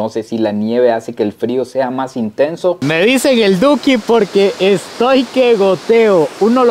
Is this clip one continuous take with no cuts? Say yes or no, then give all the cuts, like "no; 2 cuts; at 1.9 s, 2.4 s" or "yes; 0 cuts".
no; 1 cut; at 2.8 s